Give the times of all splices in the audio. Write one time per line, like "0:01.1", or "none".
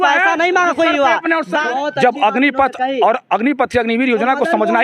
0:01.6